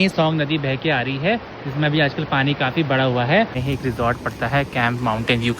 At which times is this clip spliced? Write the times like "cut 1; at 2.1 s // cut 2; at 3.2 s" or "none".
cut 1; at 3.6 s